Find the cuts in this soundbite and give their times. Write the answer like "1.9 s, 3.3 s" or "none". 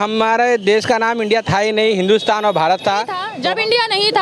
3.2 s